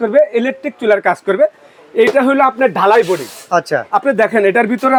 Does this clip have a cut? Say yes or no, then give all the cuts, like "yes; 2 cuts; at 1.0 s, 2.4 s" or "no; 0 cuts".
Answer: no; 0 cuts